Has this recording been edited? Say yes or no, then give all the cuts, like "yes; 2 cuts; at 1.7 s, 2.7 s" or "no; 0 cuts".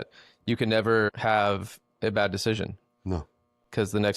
yes; 1 cut; at 1.1 s